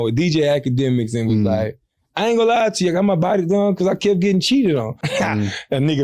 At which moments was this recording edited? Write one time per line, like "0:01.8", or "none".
0:05.0